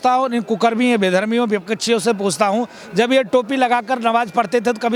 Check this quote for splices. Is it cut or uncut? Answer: uncut